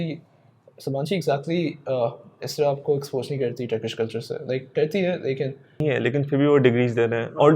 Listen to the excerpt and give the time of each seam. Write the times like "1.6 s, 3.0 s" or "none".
5.8 s